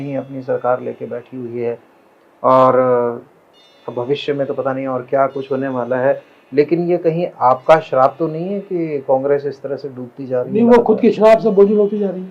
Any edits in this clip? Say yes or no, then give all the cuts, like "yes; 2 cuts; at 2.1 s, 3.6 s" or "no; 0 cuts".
no; 0 cuts